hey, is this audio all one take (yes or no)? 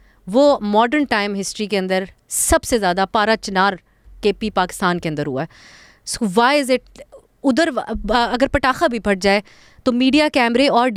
yes